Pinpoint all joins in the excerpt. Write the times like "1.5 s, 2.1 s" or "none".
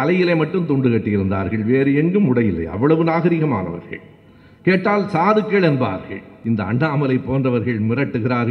6.3 s